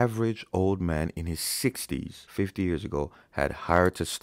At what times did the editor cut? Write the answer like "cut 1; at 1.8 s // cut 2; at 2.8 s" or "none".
cut 1; at 2.2 s